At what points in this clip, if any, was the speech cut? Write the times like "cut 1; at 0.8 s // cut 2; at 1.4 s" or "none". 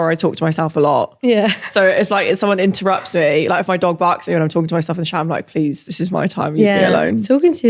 none